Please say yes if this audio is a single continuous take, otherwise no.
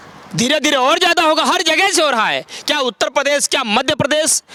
yes